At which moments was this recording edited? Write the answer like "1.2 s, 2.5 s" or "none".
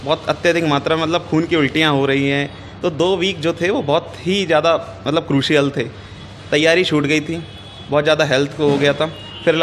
none

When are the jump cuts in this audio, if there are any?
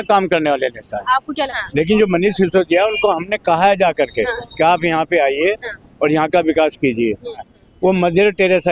1.6 s, 7.5 s

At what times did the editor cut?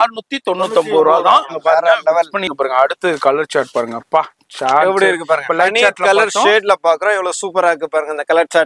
2.5 s

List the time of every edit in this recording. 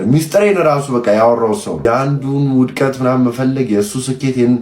1.8 s

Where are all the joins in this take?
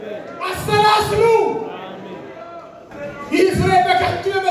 2.9 s

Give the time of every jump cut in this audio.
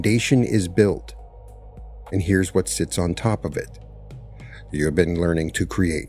none

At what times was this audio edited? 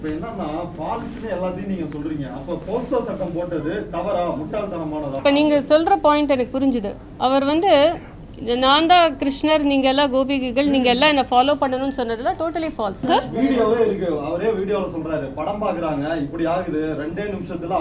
5.2 s, 13.0 s

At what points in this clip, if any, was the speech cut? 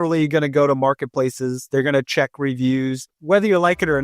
3.1 s

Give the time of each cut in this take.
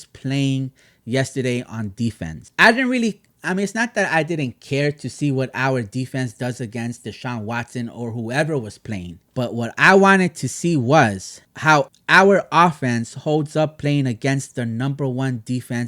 2.5 s, 9.2 s

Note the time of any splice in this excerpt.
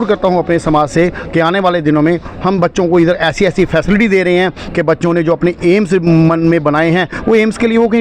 4.6 s

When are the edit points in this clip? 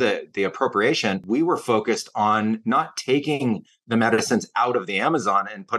1.2 s

